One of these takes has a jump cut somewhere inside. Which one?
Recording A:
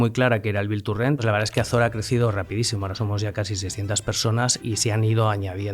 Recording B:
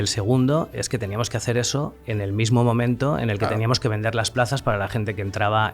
A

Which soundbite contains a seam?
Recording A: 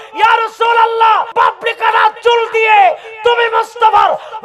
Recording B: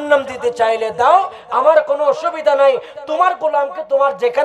A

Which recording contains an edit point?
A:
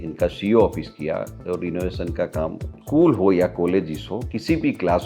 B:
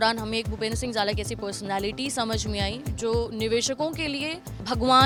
A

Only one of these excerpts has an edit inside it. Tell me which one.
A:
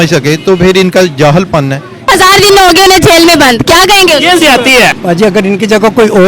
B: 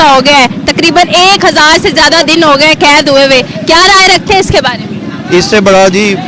A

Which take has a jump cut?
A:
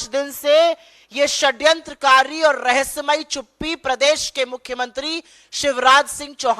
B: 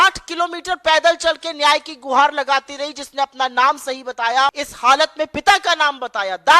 B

